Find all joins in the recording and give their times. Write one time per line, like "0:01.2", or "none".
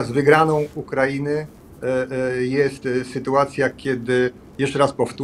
none